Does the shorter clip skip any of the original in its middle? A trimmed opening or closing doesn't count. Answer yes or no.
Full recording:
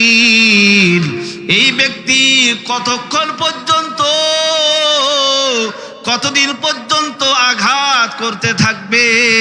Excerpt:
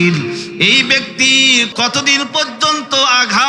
yes